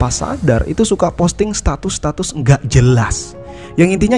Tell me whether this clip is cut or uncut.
uncut